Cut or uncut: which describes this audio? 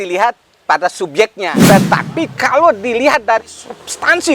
cut